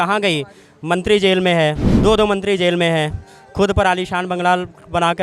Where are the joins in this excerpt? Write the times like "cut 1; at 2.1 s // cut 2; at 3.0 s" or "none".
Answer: cut 1; at 1.9 s